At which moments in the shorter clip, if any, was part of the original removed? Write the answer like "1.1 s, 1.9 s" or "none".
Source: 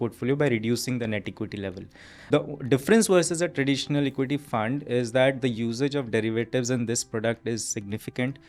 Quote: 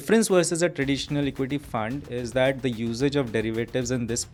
none